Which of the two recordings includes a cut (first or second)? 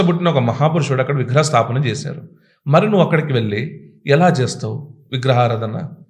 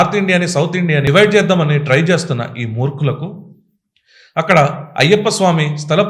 second